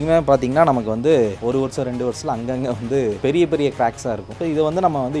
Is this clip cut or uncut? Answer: uncut